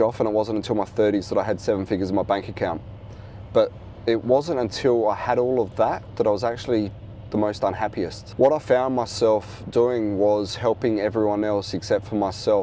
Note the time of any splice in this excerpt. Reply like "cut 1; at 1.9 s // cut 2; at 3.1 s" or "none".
none

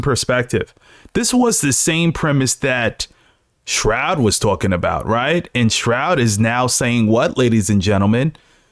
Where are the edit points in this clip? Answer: none

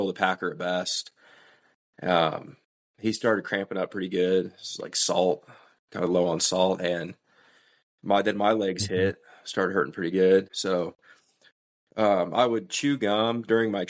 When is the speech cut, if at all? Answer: cut 1; at 10.5 s

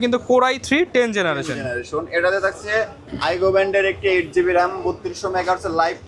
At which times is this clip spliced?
none

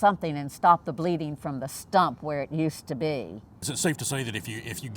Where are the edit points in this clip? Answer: cut 1; at 3.6 s

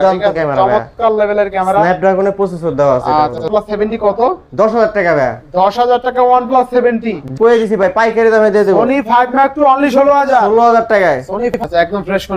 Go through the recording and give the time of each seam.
cut 1; at 3.5 s // cut 2; at 7.3 s // cut 3; at 11.5 s

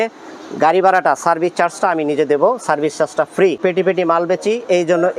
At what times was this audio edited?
cut 1; at 3.6 s

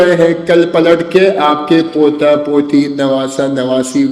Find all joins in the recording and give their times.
none

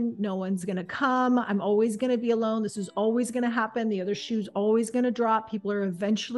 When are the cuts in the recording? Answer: none

